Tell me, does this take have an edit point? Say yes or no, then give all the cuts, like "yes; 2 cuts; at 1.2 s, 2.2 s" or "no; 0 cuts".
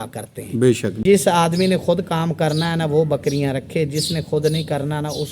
yes; 1 cut; at 1.0 s